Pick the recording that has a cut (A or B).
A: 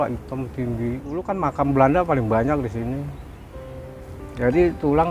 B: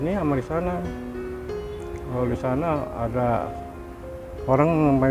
A